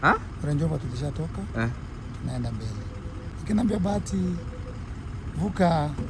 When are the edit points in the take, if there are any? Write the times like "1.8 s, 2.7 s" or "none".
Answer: 3.3 s